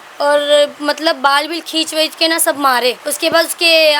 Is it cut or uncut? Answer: cut